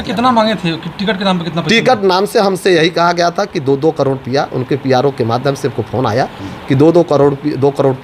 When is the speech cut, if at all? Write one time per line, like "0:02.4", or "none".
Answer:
none